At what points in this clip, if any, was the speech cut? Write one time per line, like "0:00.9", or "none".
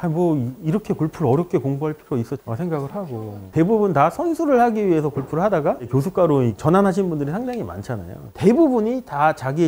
0:03.5

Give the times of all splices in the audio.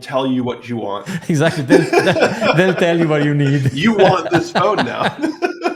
none

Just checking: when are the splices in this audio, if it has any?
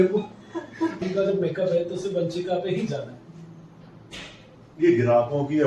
0:01.0

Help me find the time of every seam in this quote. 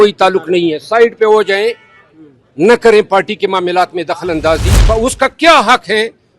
0:04.7

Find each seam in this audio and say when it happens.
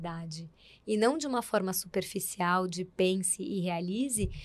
none

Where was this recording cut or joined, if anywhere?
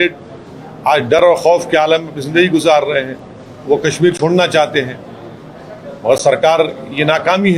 none

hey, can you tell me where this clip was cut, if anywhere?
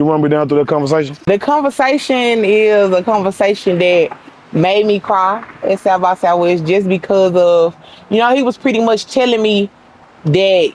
0:01.1

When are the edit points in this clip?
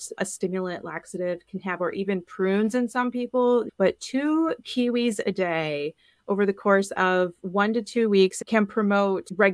0:08.3

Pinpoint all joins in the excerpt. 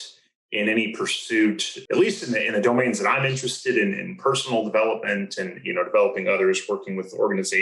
0:01.7

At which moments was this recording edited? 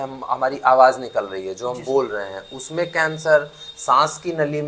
none

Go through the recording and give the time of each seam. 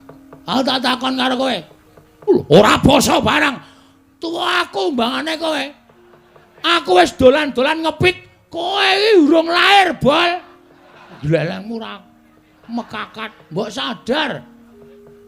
0:11.2

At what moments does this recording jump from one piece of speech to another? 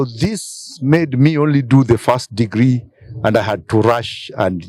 none

